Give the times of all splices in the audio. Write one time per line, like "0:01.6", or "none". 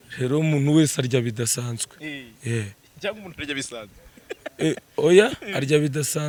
none